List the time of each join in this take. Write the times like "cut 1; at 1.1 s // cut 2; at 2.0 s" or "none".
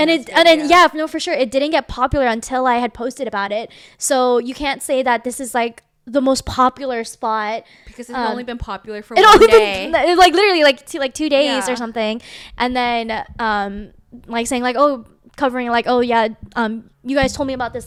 none